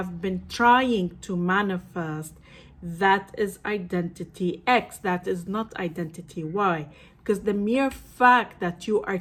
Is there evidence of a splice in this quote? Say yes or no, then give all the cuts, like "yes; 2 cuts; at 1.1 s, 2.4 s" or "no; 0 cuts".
no; 0 cuts